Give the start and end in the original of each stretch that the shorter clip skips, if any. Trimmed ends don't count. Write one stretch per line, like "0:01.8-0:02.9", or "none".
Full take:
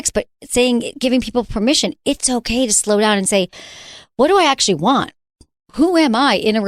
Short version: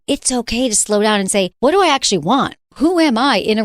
0:03.5-0:04.1
0:05.2-0:05.6